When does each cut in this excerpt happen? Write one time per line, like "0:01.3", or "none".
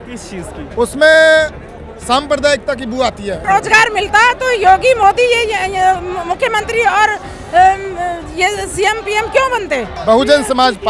0:03.4
0:09.9